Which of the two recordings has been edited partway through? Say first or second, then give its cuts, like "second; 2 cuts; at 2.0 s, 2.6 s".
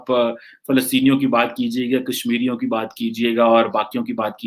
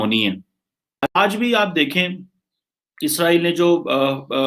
second; 1 cut; at 1.1 s